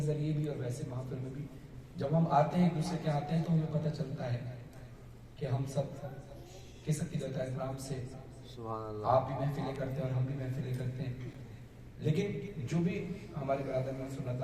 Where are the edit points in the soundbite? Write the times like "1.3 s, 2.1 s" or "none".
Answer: none

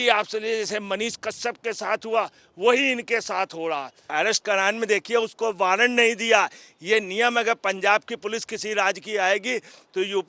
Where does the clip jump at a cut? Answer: 4.1 s

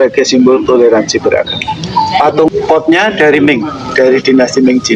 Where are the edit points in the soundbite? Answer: 2.5 s

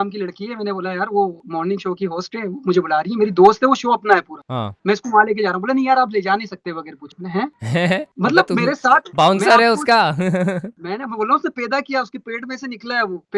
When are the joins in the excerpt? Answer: none

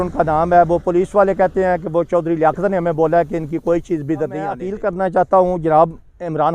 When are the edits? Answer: 4.7 s

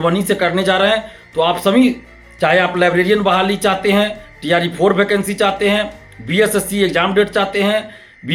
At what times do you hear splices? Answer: none

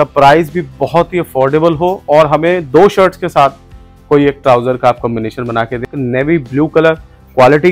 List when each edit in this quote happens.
5.9 s

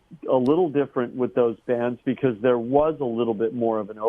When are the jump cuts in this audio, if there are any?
none

